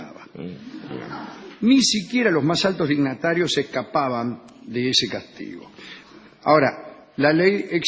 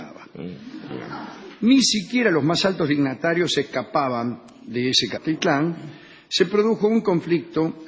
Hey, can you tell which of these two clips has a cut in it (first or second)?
first